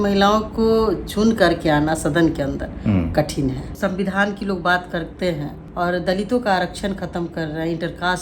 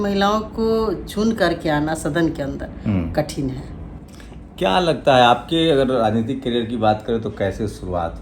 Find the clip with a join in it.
first; 2 cuts; at 3.7 s, 5.6 s

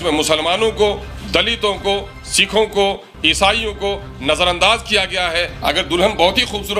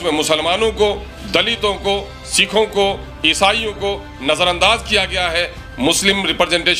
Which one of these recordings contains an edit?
first; 1 cut; at 5.5 s

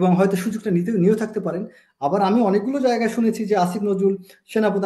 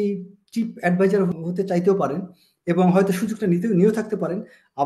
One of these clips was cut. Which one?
second; 1 cut; at 1.3 s

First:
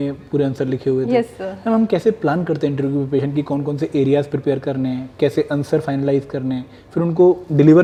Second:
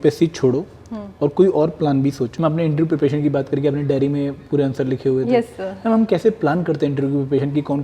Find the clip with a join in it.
second; 1 cut; at 2.3 s

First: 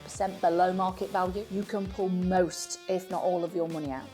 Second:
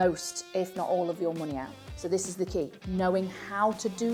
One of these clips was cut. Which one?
first; 1 cut; at 1.4 s

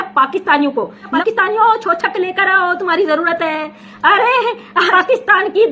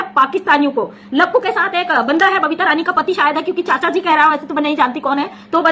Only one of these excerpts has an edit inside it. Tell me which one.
first; 2 cuts; at 1.2 s, 4.9 s

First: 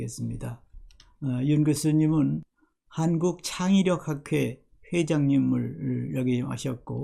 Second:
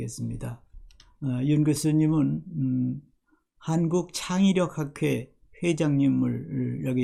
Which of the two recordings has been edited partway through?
first; 1 cut; at 2.5 s

